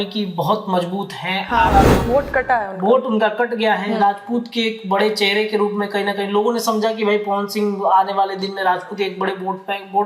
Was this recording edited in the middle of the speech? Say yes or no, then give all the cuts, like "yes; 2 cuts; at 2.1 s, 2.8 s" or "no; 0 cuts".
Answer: yes; 1 cut; at 2.0 s